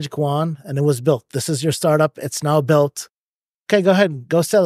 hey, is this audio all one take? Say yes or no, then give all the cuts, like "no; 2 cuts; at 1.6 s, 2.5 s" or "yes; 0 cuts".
yes; 0 cuts